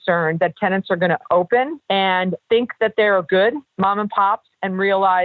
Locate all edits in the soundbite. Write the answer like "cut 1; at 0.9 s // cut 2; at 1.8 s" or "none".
cut 1; at 2.2 s // cut 2; at 3.7 s